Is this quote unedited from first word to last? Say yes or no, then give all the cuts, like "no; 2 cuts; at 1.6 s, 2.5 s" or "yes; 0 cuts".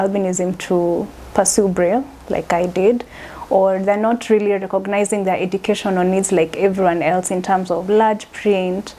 yes; 0 cuts